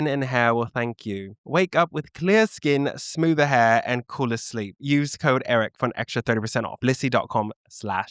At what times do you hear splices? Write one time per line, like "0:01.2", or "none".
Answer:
0:06.7